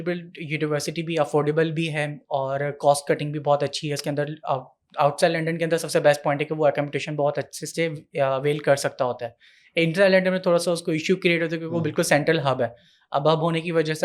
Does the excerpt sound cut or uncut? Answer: uncut